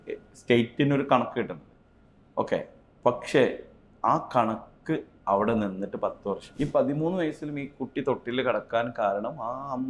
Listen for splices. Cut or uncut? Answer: cut